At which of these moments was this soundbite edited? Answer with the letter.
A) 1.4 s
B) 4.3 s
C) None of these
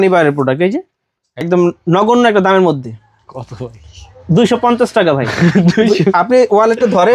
A